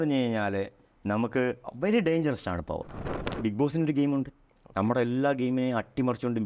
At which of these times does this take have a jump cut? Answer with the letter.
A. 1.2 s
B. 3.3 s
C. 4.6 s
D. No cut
B